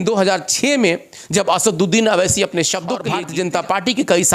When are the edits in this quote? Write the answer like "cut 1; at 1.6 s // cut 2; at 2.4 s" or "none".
cut 1; at 3.0 s